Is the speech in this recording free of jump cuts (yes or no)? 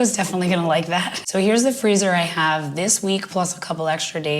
no